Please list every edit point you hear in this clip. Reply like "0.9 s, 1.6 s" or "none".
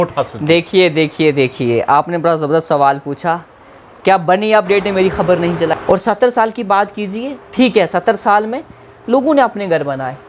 5.8 s